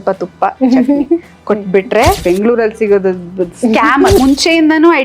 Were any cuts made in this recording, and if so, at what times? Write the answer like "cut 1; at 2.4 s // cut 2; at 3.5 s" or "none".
cut 1; at 2.2 s // cut 2; at 4.2 s